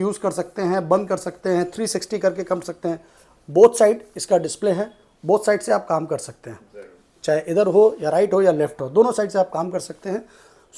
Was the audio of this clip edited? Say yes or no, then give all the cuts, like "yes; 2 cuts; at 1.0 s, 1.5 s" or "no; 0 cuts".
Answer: no; 0 cuts